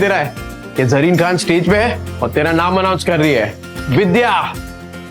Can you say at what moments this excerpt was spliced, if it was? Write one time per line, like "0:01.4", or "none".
none